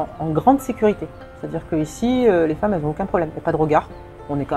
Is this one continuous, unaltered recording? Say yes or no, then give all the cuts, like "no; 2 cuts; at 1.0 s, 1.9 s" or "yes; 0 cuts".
yes; 0 cuts